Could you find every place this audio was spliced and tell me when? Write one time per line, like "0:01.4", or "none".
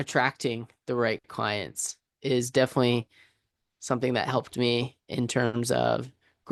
none